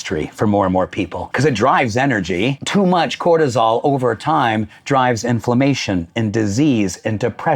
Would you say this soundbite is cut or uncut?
cut